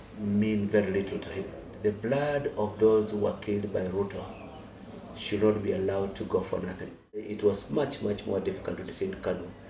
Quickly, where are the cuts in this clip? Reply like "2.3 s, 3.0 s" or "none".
1.7 s, 7.3 s